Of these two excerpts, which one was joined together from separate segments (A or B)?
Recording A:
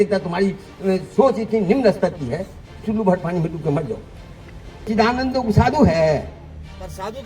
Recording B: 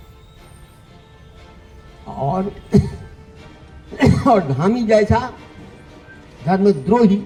A